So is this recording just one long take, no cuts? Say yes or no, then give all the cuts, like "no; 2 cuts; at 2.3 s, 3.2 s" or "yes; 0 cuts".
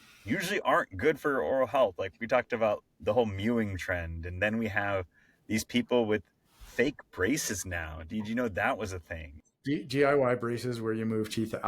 no; 1 cut; at 9.6 s